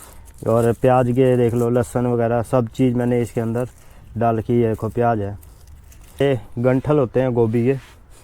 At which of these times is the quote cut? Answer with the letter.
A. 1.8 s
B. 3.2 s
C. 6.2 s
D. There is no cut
C